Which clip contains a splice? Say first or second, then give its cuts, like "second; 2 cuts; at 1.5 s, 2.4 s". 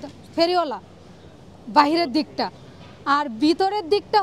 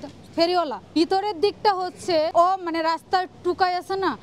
second; 2 cuts; at 1.0 s, 2.3 s